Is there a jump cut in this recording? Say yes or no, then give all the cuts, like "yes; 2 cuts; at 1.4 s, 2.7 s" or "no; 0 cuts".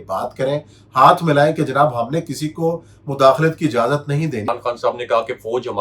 yes; 1 cut; at 4.4 s